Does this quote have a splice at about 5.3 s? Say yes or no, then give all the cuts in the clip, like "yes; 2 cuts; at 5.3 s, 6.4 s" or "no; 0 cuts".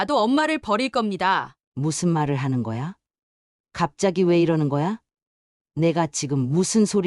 no; 1 cut; at 1.6 s